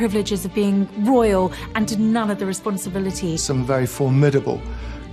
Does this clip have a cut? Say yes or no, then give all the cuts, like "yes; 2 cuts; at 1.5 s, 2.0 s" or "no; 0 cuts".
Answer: yes; 1 cut; at 3.4 s